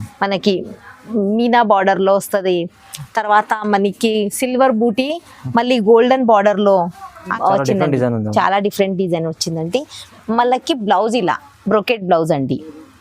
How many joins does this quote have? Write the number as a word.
one